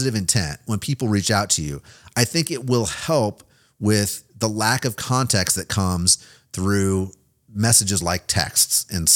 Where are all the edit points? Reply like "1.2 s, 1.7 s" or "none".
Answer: none